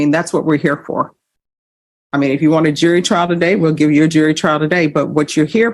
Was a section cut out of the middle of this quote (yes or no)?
no